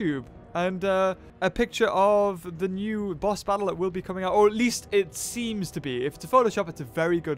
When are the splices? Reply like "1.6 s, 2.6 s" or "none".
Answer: 1.3 s